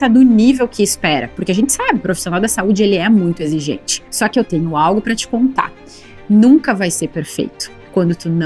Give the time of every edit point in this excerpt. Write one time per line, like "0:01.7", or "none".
0:04.3

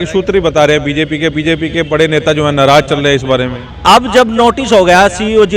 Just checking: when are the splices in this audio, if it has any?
0:03.8

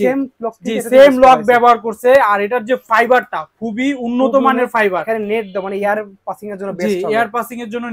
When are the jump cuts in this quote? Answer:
none

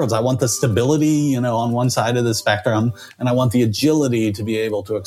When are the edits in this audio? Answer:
none

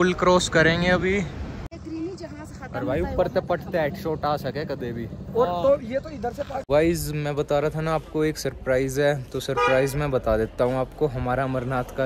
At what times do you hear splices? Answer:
0:01.7
0:06.6

